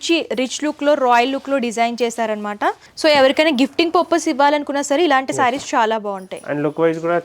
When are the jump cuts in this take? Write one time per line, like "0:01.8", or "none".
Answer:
0:02.9